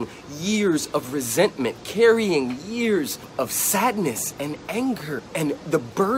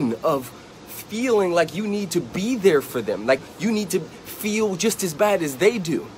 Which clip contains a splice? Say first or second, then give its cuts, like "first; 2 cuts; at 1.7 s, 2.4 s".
first; 1 cut; at 5.2 s